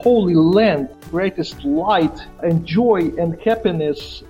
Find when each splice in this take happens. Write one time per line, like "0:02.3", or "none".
0:01.0